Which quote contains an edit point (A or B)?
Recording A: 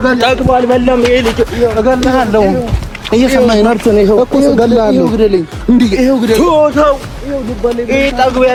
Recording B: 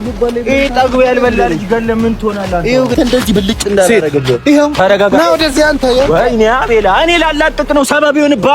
B